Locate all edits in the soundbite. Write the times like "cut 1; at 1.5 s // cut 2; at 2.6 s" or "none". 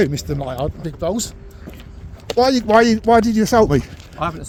none